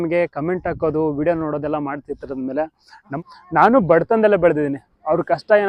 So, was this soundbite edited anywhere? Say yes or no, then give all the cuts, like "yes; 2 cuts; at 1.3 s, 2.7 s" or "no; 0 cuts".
yes; 1 cut; at 3.2 s